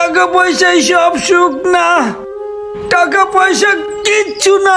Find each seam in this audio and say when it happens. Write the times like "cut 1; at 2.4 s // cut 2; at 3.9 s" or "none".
none